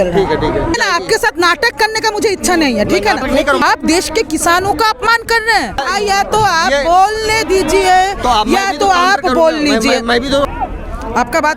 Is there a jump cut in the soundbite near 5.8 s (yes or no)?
yes